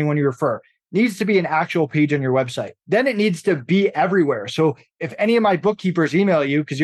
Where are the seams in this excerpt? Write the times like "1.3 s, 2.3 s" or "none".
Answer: none